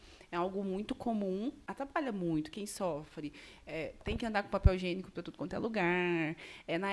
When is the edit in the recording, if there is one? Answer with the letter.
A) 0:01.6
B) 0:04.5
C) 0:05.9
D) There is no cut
A